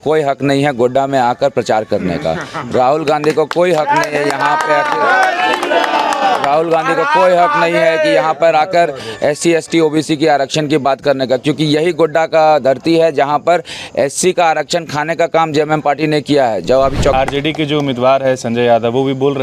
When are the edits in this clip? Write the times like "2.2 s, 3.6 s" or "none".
17.1 s

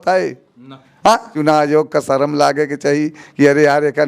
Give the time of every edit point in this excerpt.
1.3 s

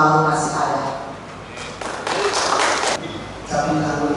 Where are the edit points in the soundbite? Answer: 3.0 s

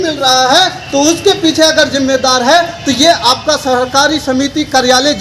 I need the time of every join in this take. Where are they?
none

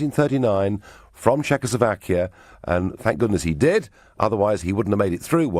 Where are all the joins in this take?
4.0 s

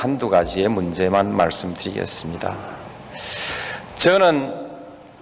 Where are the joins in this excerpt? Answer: 1.3 s

